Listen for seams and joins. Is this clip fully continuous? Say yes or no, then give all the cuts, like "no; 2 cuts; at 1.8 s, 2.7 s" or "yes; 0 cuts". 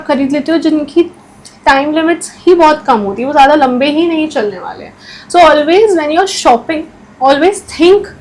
yes; 0 cuts